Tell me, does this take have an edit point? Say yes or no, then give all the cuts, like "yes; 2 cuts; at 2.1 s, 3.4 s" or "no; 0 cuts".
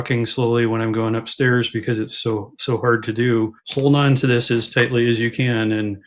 yes; 1 cut; at 3.6 s